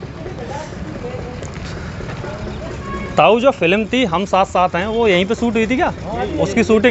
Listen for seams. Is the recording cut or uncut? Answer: uncut